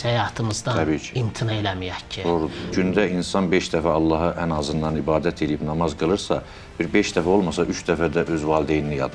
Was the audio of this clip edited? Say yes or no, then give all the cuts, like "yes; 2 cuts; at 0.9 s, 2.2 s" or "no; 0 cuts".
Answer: yes; 1 cut; at 2.7 s